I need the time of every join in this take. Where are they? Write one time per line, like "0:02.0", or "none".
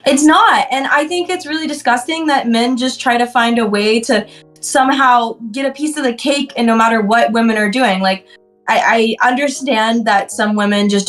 none